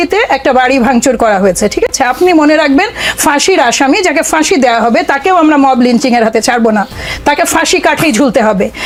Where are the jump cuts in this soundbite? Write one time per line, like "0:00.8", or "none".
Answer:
none